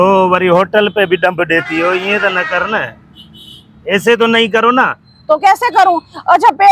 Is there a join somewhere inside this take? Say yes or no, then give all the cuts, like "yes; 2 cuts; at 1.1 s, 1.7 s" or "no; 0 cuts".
no; 0 cuts